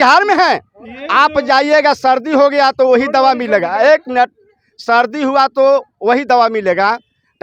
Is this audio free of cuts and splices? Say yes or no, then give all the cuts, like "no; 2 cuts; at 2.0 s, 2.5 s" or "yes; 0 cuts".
yes; 0 cuts